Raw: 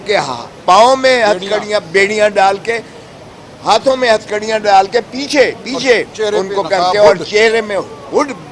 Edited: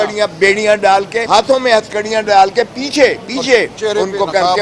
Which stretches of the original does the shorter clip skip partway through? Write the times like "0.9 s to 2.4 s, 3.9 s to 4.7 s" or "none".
2.8 s to 3.6 s